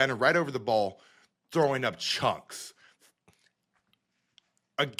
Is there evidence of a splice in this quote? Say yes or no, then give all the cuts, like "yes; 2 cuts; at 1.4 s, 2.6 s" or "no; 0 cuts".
no; 0 cuts